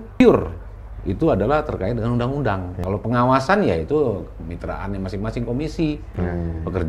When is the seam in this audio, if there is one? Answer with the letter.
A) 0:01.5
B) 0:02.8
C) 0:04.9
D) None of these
B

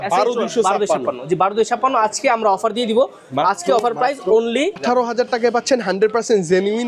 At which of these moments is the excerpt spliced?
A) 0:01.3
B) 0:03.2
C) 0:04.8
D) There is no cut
C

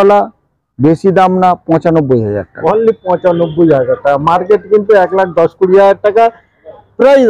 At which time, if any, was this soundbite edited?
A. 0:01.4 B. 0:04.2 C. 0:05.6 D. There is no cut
D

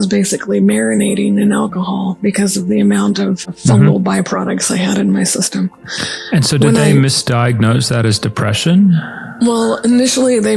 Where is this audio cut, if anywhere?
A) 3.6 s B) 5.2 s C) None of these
A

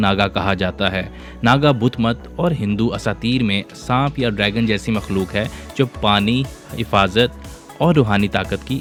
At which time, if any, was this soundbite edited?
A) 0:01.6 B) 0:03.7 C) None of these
C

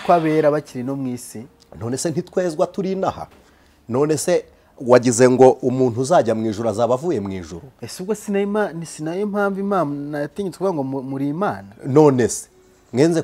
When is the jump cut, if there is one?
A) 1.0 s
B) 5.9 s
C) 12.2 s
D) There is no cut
D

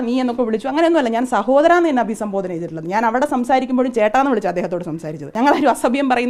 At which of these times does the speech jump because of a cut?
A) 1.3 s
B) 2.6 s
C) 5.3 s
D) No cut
C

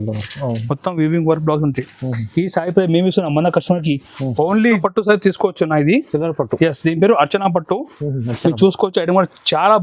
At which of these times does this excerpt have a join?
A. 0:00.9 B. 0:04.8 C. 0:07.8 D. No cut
B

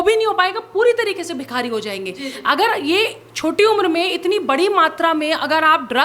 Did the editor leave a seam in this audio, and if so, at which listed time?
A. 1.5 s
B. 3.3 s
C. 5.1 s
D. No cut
D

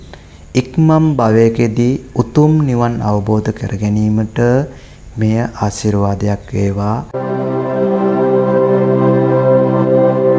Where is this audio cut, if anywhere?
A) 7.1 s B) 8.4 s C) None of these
A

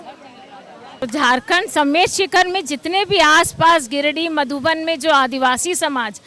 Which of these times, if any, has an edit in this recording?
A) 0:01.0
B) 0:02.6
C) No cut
A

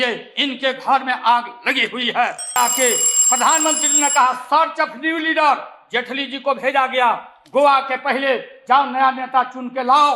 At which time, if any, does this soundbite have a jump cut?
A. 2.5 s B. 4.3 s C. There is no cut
A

